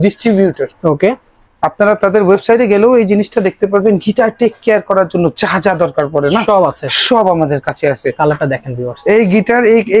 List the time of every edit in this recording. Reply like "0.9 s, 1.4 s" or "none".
8.1 s